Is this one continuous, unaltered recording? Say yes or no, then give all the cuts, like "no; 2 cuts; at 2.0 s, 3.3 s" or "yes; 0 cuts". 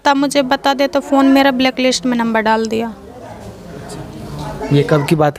yes; 0 cuts